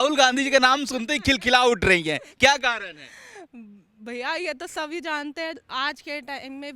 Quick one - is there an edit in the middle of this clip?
yes; 1 cut; at 5.6 s

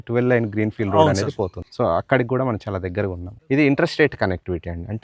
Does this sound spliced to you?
yes; 2 cuts; at 1.6 s, 3.3 s

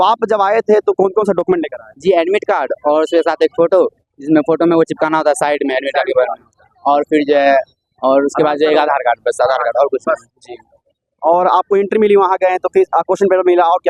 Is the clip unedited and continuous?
yes; 0 cuts

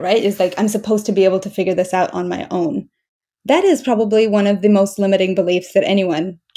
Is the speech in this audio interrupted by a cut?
no; 0 cuts

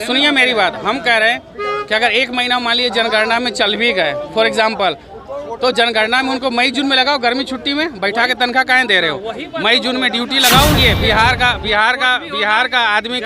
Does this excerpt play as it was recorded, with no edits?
no; 1 cut; at 10.8 s

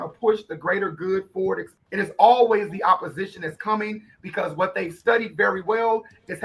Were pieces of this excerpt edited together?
yes; 1 cut; at 1.8 s

